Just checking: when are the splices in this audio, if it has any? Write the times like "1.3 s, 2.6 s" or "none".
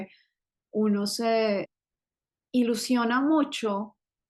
1.7 s